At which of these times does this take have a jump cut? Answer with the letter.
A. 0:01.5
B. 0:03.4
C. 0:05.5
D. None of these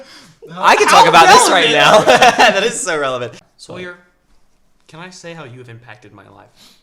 B